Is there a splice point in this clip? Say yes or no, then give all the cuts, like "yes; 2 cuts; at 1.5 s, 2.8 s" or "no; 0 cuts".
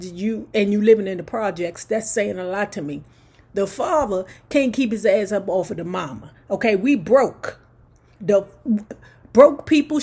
no; 0 cuts